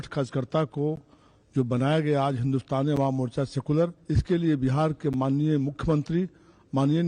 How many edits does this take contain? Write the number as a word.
one